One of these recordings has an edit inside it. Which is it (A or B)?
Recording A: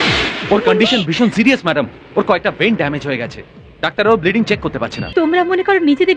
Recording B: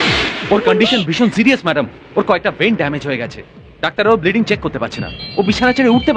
A